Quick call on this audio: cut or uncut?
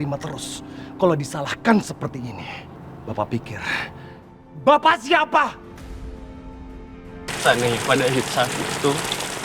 cut